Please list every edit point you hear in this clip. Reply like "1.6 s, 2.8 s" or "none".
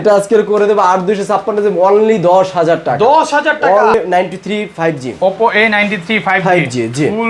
3.9 s